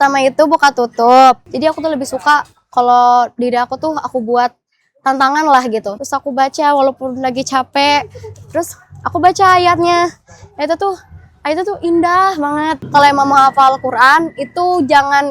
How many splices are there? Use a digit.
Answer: 3